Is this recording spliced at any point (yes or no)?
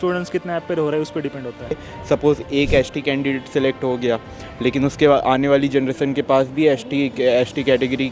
yes